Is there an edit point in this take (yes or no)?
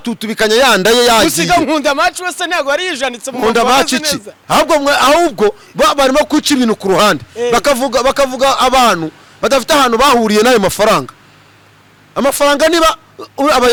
no